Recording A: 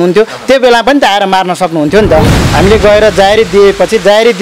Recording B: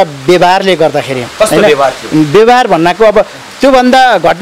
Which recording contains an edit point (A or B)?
A